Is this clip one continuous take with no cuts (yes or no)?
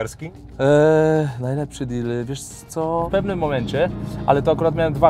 no